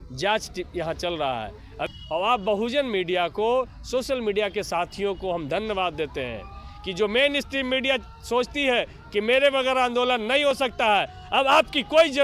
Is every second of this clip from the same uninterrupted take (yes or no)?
no